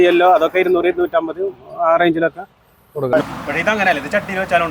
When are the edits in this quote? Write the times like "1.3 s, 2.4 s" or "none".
3.2 s